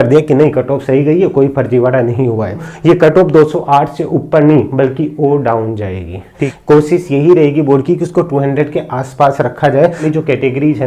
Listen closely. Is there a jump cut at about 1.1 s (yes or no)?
no